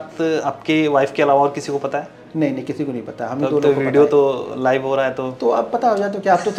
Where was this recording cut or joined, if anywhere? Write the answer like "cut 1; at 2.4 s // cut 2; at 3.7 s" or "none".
none